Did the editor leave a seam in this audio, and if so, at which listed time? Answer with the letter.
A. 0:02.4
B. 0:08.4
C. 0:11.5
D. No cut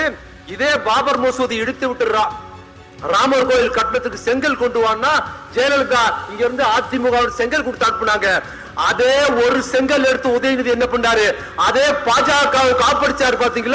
D